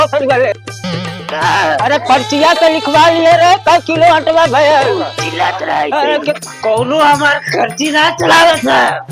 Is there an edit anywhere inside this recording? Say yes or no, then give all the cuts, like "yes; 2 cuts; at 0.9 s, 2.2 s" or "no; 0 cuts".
yes; 1 cut; at 6.4 s